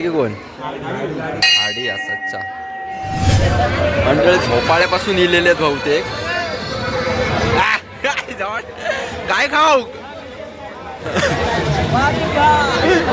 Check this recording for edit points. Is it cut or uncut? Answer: cut